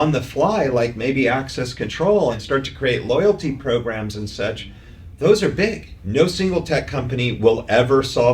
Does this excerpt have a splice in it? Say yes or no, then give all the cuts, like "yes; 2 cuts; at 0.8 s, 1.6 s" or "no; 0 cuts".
yes; 2 cuts; at 2.4 s, 5.9 s